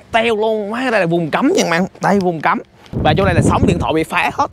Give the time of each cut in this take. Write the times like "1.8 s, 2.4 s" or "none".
2.9 s